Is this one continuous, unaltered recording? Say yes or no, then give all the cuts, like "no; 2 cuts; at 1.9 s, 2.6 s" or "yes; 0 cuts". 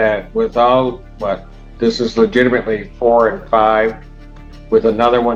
yes; 0 cuts